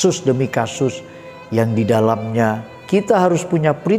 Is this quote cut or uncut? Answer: uncut